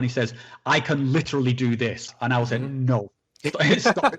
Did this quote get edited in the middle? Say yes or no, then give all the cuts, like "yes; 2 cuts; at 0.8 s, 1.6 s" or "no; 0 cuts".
yes; 1 cut; at 2.1 s